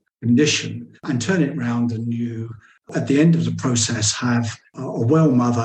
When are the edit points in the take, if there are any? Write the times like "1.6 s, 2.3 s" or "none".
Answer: 2.9 s